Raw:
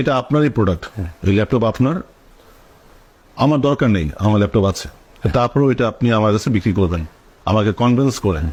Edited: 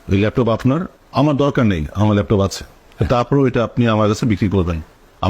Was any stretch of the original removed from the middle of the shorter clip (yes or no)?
yes